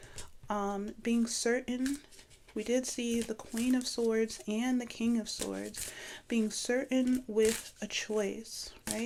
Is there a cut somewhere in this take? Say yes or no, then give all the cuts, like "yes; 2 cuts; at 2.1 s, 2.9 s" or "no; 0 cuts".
no; 0 cuts